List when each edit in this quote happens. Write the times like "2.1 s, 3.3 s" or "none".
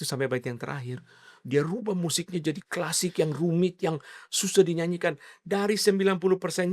none